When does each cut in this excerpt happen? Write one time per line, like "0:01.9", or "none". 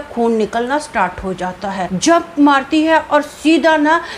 0:01.9

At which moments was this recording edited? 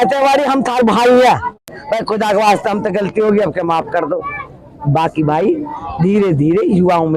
0:01.7

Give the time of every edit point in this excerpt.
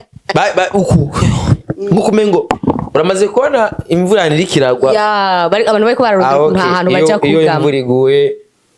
none

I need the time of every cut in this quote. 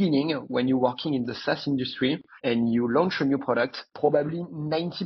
0:02.3
0:03.8

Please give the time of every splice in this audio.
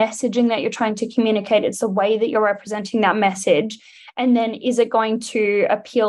none

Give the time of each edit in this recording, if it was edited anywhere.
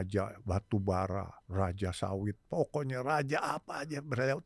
0:01.4

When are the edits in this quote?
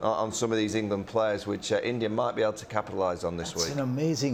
none

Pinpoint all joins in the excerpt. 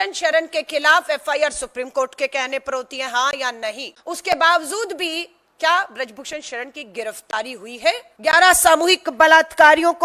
0:03.9
0:08.1

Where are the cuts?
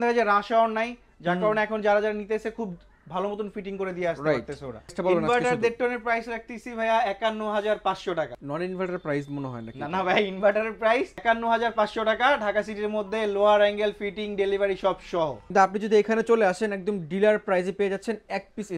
0:04.9
0:08.4
0:11.1
0:15.4

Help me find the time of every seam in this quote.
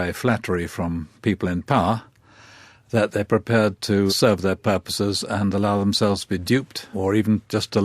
0:04.1
0:06.8

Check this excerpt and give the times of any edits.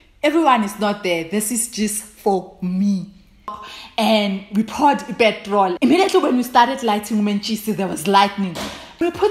0:03.7

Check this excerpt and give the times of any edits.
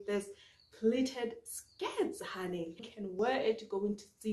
0:03.1

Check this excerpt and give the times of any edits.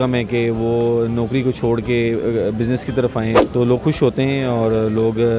0:03.4

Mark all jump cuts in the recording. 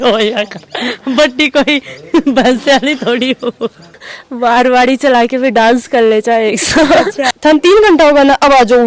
0:04.0
0:07.3

